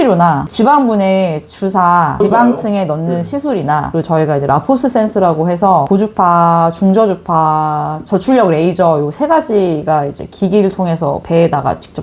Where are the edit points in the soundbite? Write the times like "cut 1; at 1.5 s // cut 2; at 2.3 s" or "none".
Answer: none